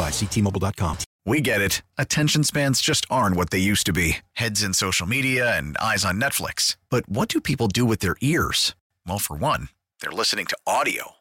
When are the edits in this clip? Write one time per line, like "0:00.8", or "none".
0:01.1